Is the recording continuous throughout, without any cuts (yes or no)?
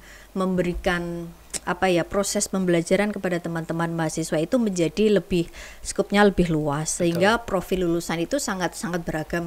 yes